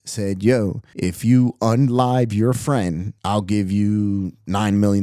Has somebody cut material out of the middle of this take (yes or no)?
no